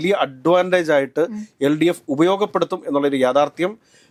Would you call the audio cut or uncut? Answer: uncut